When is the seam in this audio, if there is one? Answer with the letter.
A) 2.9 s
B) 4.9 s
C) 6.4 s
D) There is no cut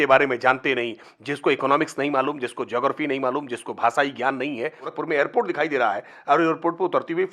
B